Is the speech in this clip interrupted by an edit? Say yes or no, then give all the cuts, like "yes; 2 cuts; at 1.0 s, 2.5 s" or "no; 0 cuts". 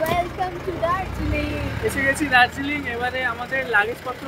no; 0 cuts